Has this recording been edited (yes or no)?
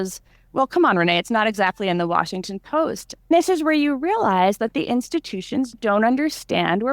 yes